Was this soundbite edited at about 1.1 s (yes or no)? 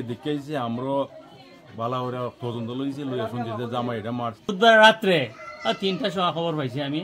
no